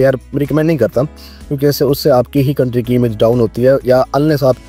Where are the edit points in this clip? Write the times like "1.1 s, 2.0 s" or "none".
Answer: none

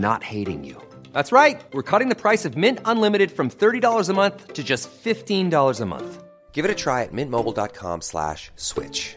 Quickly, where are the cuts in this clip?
none

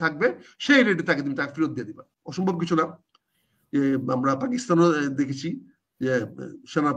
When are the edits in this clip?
2.2 s

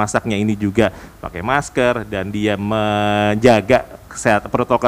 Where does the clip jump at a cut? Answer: none

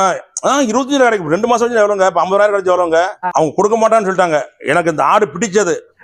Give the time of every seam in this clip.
3.2 s

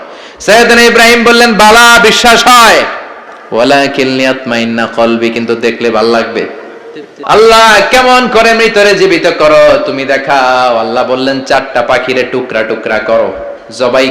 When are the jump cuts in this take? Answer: 7.1 s

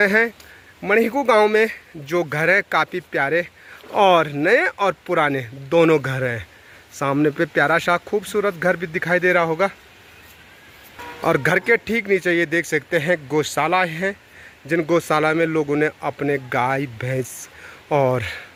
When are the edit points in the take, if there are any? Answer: none

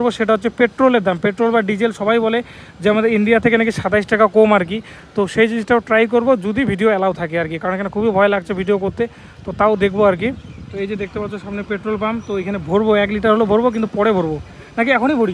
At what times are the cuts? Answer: none

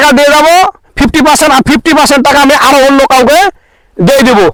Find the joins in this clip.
none

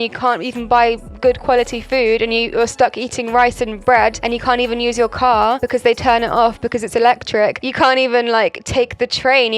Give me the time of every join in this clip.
7.6 s

